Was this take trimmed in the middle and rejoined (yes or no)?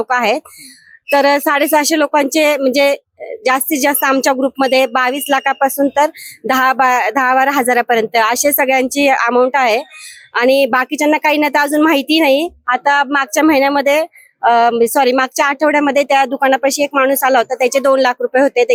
no